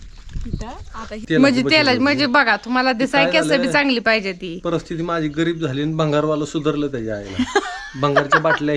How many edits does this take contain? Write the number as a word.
one